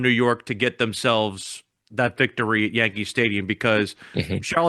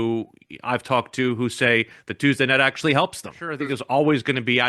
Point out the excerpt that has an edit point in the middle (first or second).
second